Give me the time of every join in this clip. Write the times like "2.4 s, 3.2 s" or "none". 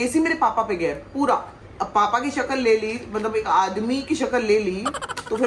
none